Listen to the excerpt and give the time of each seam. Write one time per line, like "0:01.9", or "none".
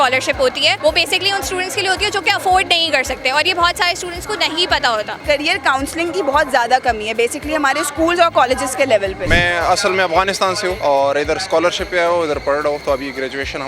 0:00.8
0:05.2
0:09.2
0:10.8